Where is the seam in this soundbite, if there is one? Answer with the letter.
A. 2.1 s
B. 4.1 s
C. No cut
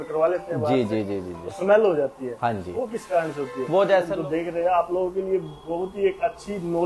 B